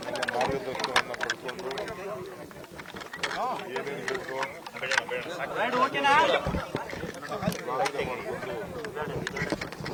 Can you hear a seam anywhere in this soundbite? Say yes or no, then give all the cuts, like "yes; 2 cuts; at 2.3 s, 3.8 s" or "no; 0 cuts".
no; 0 cuts